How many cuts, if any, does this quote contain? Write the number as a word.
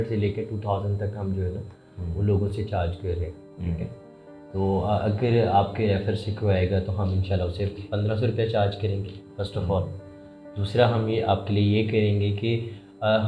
zero